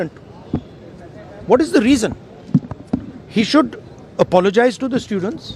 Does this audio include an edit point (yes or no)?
no